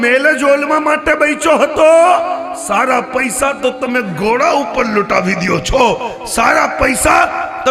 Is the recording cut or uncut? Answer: uncut